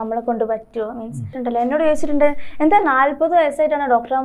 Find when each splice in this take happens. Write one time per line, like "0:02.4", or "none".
0:01.3